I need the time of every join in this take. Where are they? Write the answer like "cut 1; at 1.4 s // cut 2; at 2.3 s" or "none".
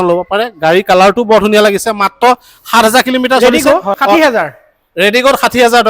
cut 1; at 3.4 s